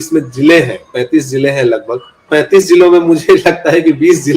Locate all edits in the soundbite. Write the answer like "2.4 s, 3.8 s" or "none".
2.3 s